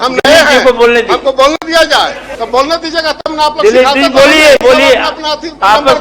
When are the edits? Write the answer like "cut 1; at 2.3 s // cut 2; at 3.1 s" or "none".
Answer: cut 1; at 2.2 s